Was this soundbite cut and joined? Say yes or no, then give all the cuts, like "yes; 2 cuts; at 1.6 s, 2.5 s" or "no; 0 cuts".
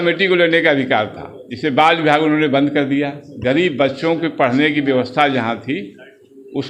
no; 0 cuts